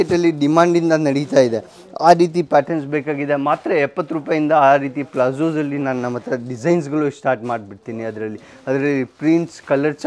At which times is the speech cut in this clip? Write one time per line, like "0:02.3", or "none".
none